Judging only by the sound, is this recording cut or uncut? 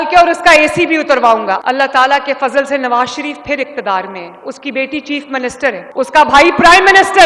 cut